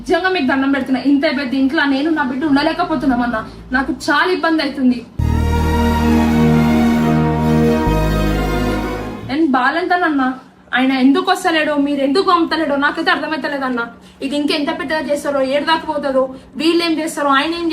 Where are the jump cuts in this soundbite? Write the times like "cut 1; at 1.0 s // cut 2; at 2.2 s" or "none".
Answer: none